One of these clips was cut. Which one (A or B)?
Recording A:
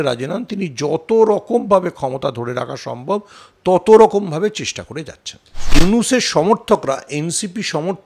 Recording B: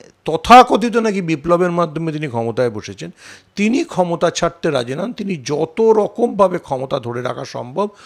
A